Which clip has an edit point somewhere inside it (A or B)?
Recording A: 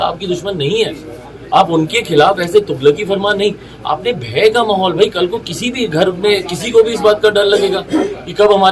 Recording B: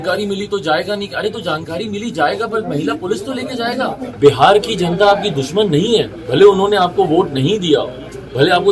B